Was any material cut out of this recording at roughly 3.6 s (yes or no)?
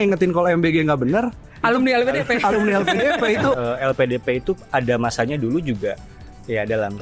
yes